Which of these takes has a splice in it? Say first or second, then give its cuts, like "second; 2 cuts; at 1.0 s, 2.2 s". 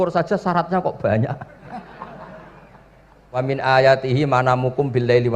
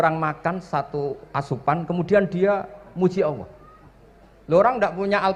first; 1 cut; at 3.4 s